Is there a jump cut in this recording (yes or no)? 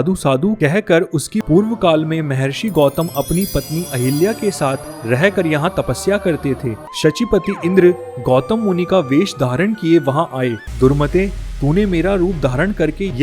yes